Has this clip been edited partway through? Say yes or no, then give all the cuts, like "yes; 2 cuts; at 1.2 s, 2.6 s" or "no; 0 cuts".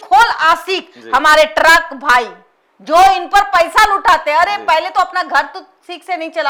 no; 0 cuts